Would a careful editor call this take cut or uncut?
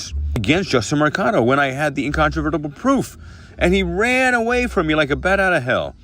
uncut